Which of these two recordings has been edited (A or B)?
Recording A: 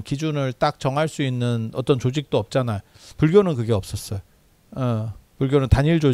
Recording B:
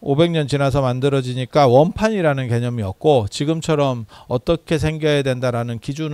A